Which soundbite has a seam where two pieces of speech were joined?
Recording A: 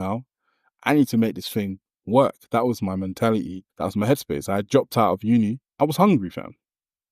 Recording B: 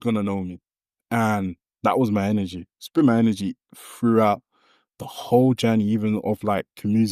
A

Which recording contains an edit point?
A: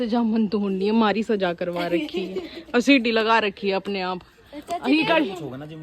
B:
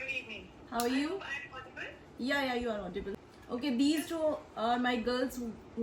B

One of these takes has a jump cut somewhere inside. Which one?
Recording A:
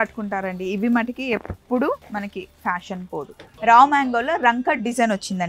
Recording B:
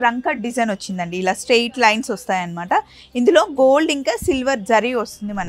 A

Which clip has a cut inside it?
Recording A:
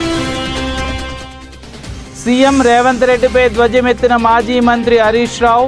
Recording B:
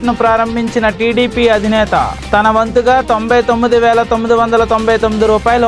A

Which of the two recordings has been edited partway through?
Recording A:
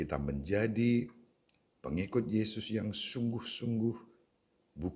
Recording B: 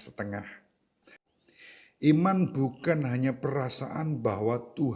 B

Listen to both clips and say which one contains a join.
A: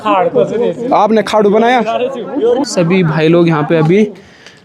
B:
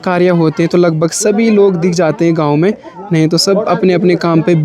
A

